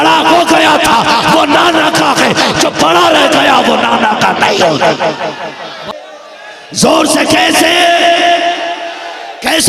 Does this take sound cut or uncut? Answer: cut